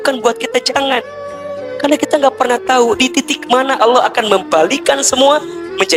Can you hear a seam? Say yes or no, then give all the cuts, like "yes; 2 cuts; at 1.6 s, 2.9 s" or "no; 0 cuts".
no; 0 cuts